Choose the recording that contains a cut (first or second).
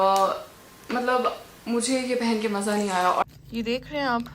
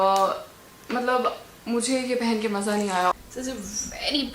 first